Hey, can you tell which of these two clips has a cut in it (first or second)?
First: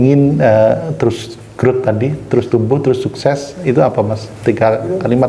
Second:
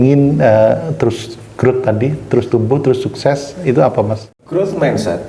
second